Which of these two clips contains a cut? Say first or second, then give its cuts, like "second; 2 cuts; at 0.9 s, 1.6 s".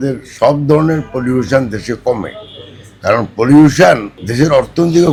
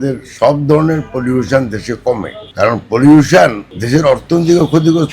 second; 1 cut; at 2.4 s